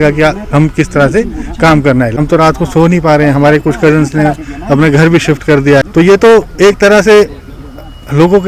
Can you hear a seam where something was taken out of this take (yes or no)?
yes